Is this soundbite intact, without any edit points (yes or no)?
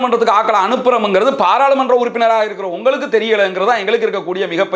yes